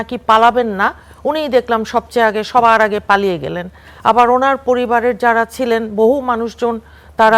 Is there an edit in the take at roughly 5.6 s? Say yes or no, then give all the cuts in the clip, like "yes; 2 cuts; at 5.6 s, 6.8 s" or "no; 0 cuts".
no; 0 cuts